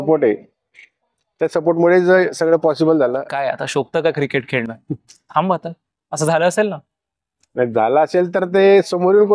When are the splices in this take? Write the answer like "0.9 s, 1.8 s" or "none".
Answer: 3.2 s